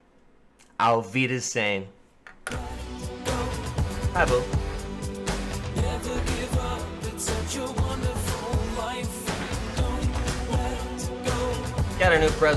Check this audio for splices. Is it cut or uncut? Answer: cut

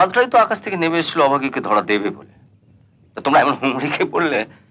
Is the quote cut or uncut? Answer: uncut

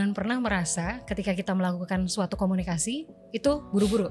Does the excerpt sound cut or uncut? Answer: uncut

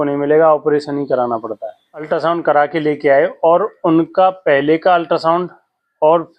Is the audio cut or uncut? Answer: cut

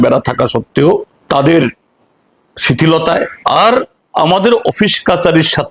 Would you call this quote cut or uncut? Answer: cut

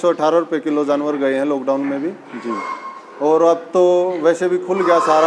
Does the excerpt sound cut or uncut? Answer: uncut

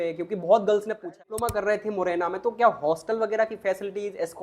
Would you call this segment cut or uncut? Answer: cut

